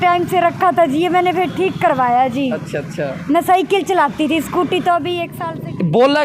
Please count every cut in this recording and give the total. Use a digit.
1